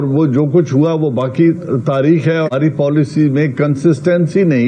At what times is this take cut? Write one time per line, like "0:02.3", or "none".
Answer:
0:02.5